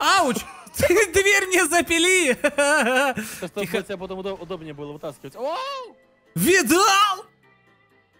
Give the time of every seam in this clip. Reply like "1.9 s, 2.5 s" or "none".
none